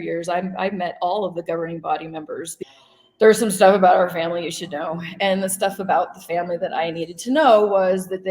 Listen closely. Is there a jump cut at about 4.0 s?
no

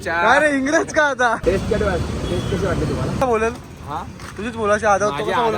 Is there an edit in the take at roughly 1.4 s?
yes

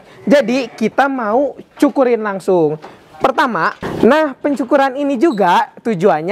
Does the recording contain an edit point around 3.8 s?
yes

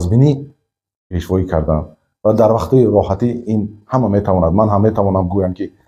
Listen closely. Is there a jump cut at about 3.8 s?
no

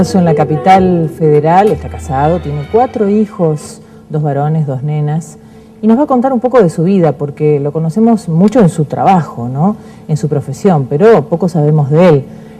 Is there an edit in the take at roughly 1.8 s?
yes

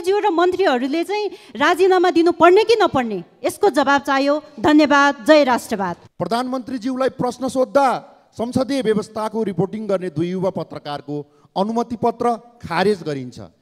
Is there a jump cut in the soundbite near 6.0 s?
yes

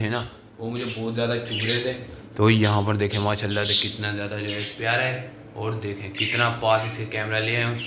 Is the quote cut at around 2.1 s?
no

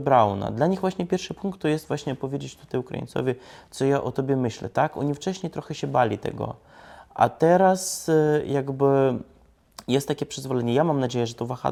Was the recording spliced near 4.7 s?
no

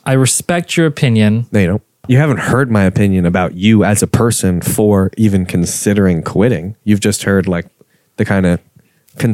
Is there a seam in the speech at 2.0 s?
yes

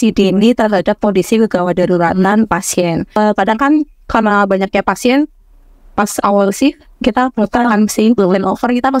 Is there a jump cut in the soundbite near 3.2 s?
yes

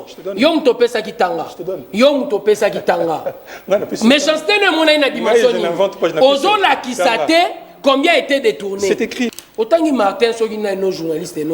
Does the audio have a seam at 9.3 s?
yes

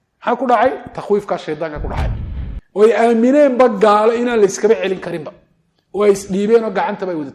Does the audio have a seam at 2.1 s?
yes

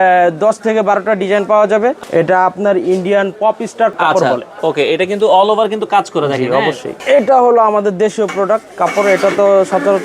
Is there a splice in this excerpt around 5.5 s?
no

